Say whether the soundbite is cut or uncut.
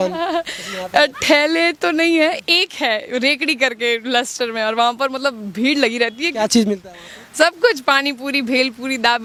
uncut